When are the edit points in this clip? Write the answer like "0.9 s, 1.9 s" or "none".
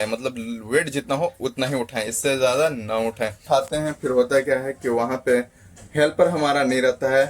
3.4 s